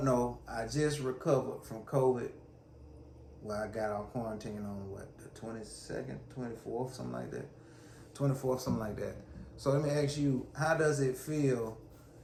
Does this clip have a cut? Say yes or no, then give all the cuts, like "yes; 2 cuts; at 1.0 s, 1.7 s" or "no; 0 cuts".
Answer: no; 0 cuts